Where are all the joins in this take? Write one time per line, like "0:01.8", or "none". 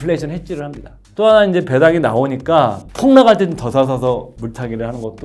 0:01.0
0:02.8
0:04.3